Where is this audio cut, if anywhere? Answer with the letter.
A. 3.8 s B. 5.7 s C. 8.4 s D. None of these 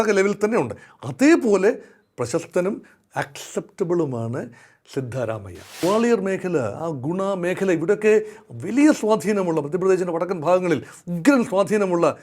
B